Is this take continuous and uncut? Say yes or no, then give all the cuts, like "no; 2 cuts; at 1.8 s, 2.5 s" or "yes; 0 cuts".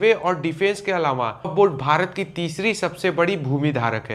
no; 1 cut; at 1.5 s